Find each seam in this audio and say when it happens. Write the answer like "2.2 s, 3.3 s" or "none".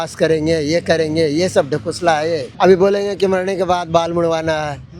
2.5 s